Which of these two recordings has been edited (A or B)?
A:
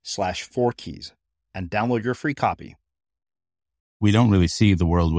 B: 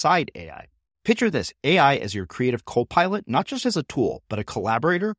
A